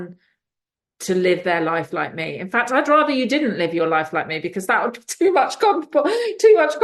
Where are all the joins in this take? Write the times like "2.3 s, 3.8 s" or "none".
none